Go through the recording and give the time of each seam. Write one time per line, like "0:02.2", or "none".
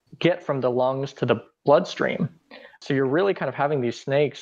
0:02.8